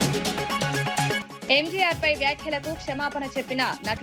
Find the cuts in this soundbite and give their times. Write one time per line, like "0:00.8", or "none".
0:01.2